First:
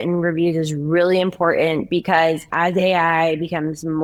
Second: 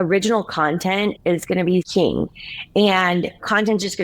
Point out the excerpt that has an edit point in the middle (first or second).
second